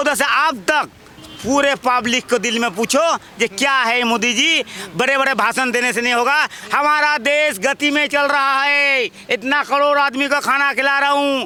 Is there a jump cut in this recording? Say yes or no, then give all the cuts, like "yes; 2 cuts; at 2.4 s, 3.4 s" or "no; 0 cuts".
no; 0 cuts